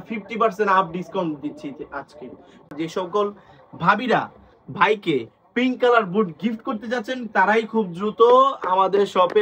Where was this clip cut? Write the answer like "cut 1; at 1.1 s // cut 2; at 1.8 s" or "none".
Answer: cut 1; at 2.7 s